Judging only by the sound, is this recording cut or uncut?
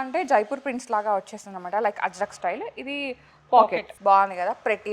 cut